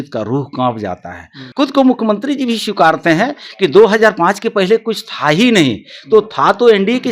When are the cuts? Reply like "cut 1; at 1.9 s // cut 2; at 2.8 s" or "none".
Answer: cut 1; at 1.4 s